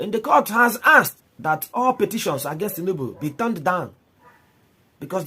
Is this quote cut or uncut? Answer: cut